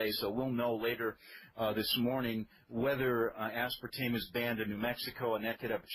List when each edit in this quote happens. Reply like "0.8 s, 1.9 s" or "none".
3.4 s